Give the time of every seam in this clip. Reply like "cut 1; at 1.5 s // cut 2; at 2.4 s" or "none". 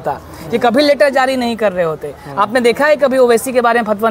none